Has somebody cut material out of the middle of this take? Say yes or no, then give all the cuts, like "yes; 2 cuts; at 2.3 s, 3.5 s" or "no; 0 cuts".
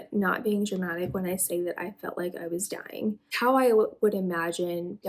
yes; 1 cut; at 3.3 s